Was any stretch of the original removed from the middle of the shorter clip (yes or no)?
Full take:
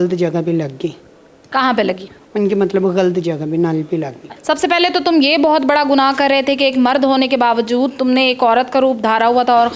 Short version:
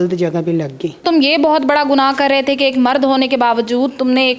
yes